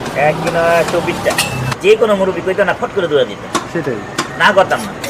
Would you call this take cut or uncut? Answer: cut